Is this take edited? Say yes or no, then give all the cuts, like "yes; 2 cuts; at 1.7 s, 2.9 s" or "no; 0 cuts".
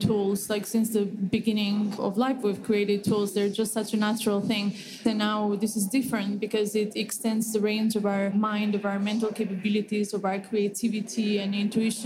yes; 3 cuts; at 2.0 s, 5.0 s, 8.3 s